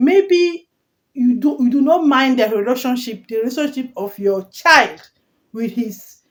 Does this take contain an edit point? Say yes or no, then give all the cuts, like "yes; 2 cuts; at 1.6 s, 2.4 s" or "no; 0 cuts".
no; 0 cuts